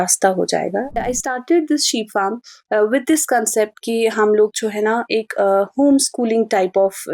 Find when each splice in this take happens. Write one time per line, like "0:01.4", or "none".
0:01.0